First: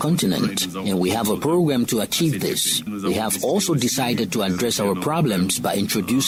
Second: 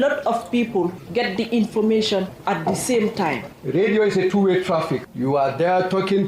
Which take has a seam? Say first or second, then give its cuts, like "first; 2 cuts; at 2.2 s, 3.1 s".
second; 1 cut; at 3.5 s